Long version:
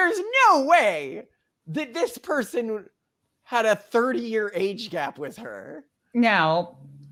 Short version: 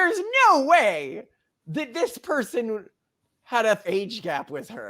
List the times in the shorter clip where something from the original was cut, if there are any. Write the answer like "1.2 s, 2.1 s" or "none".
3.8 s

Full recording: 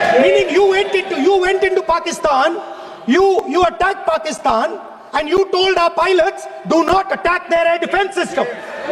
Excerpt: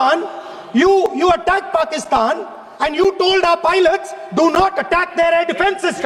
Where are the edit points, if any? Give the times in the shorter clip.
none

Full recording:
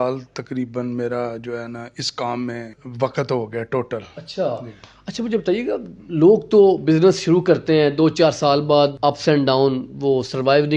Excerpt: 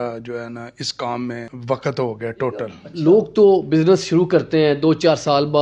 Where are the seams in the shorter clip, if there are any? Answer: 1.5 s, 2.8 s

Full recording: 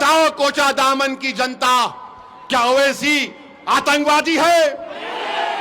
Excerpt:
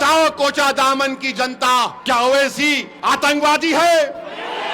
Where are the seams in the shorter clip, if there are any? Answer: 2.0 s, 2.9 s

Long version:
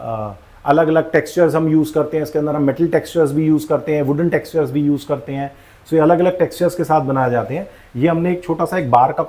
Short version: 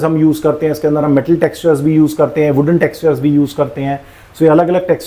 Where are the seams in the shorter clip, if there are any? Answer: none

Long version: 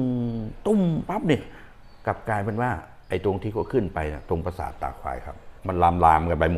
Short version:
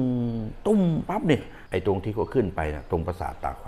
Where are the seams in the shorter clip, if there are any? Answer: 1.6 s

